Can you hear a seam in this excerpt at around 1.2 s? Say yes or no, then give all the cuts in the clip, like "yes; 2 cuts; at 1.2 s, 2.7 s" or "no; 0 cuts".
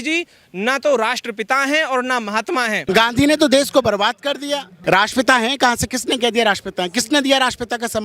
no; 2 cuts; at 2.8 s, 4.7 s